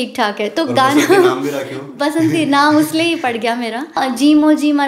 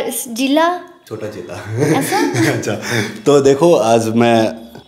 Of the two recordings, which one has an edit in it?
first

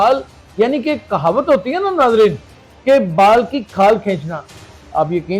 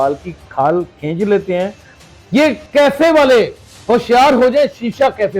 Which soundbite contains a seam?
second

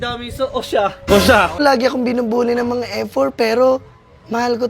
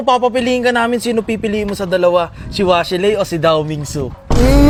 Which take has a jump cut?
first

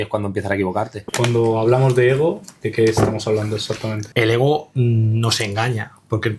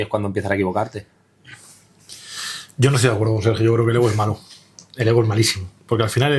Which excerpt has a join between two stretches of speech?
first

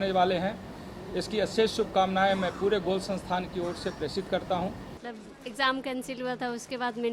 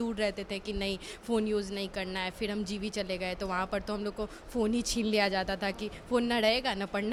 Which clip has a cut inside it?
first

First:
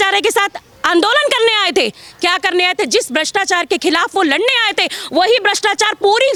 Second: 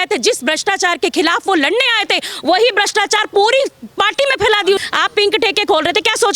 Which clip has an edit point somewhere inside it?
second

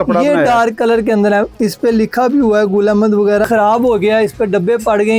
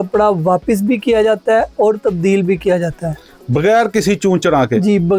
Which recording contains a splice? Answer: first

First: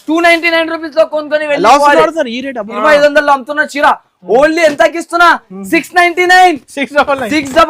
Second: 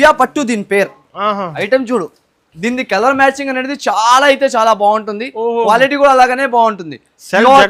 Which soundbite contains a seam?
first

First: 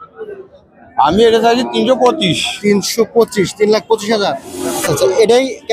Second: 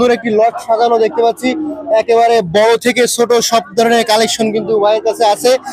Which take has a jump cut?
first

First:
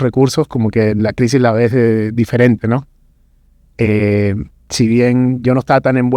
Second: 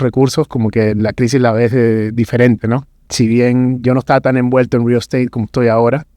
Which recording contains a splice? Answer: second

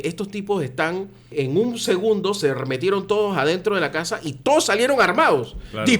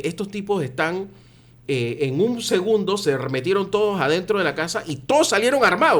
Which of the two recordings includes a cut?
first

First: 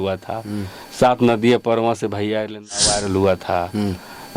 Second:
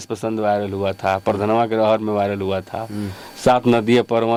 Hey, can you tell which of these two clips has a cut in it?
first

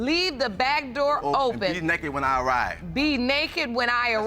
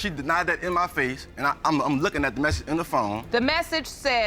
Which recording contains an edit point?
second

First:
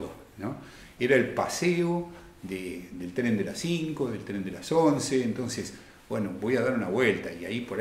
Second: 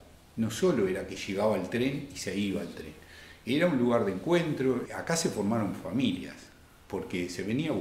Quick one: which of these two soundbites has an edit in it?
second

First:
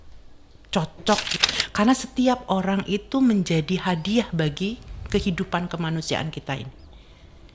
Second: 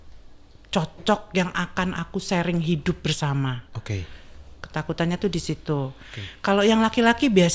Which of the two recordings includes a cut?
first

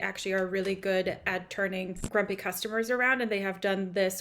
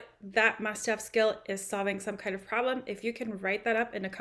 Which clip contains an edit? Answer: first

